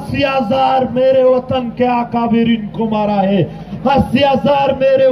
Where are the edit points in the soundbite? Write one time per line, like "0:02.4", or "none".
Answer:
0:03.6